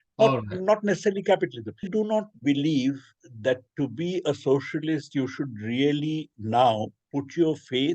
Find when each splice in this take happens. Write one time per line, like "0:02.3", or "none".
0:01.9